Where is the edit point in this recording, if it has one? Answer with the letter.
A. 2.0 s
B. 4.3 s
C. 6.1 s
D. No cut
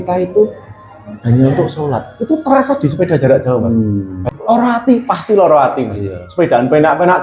B